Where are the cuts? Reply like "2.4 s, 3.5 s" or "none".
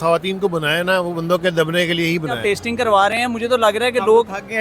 2.4 s